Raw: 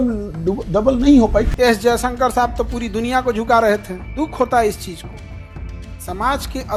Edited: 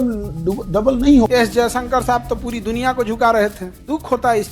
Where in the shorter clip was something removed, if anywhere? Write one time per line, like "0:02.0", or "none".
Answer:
0:01.3